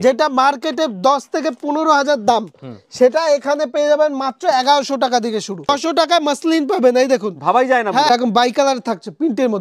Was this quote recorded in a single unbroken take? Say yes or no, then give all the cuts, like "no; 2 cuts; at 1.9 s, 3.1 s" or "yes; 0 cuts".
no; 2 cuts; at 5.7 s, 8.1 s